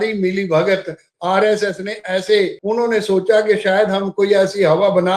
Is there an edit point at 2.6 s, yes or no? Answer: yes